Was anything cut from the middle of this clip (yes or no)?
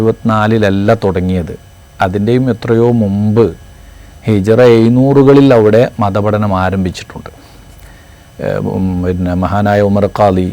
no